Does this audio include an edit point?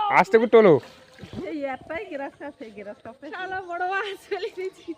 yes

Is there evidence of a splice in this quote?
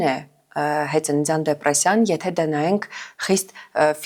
no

